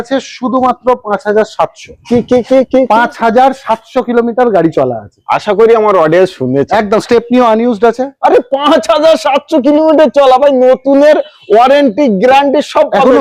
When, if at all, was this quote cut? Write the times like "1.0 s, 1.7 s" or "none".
none